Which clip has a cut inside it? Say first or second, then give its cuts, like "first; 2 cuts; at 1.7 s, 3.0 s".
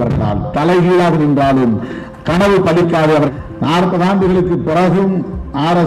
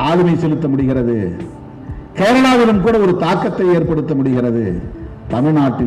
first; 1 cut; at 3.3 s